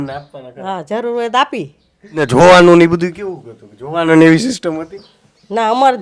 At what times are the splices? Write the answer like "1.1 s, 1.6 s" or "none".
2.3 s